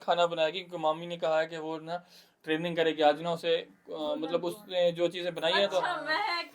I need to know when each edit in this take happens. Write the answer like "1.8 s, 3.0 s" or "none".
none